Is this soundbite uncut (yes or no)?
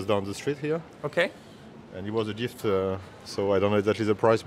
yes